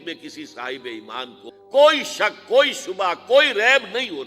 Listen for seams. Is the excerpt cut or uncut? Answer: cut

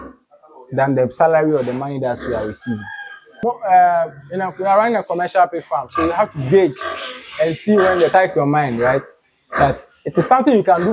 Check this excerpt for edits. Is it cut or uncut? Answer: cut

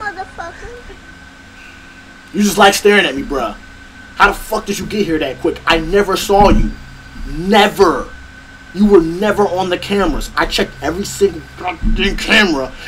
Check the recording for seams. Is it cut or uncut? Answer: cut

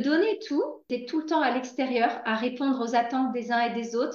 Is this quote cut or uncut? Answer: cut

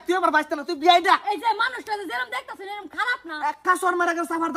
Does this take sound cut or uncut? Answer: uncut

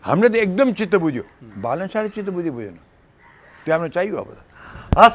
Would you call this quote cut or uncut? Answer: uncut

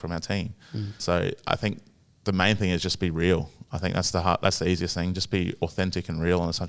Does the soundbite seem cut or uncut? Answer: cut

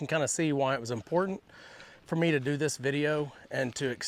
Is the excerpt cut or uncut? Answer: uncut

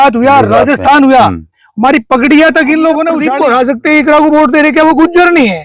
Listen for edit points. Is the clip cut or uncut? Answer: cut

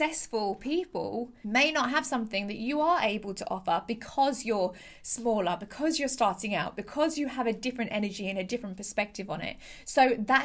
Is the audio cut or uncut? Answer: cut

